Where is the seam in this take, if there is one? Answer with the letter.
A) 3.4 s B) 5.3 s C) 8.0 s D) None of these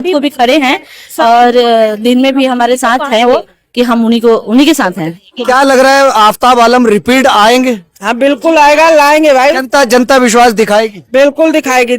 B